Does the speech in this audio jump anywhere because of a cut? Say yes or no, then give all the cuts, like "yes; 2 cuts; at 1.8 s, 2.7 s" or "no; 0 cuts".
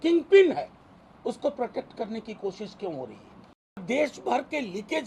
yes; 1 cut; at 3.8 s